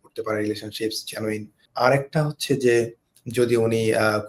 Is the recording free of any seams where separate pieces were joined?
no; 1 cut; at 1.6 s

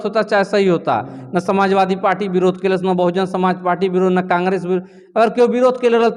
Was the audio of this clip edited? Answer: no; 0 cuts

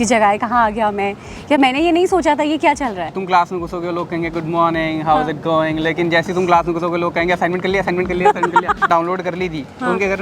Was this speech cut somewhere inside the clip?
yes; 2 cuts; at 3.2 s, 8.9 s

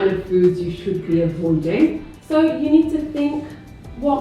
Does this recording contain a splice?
yes; 1 cut; at 2.1 s

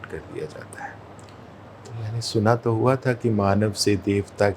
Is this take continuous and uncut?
yes; 0 cuts

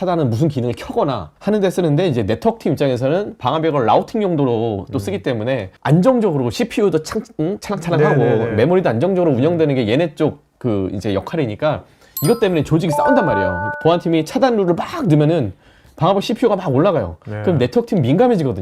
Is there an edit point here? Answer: no; 0 cuts

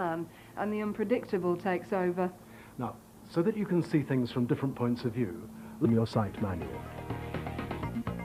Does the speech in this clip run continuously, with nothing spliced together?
yes; 0 cuts

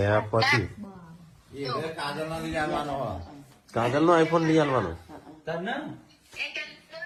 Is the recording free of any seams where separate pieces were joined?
yes; 0 cuts

